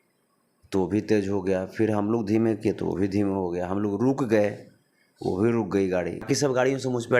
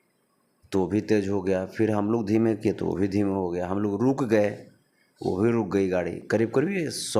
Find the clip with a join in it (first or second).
first